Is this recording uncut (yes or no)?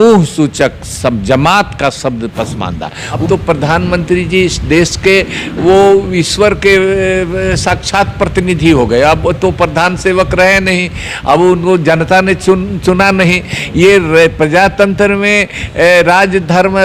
no